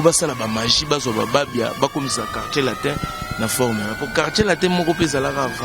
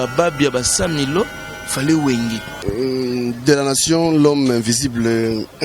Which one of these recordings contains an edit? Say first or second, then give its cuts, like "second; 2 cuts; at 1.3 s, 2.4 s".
second; 1 cut; at 2.5 s